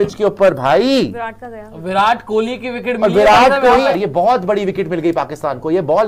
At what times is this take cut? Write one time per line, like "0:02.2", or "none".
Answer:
0:03.9